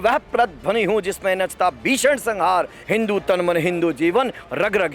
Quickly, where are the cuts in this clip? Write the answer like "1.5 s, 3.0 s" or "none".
2.8 s